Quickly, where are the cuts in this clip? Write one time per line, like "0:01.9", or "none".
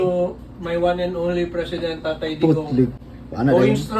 0:03.0